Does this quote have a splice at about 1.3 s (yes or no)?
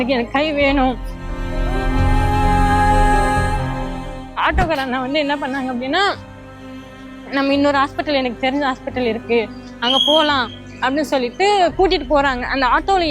yes